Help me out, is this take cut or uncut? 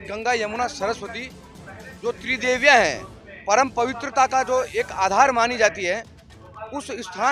uncut